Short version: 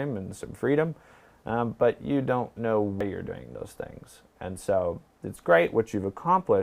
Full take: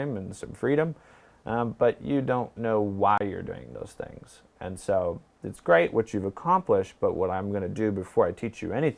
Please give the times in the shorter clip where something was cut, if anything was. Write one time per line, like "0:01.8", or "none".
0:03.0